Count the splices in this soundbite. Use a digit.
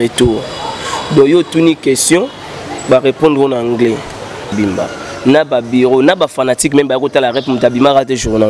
1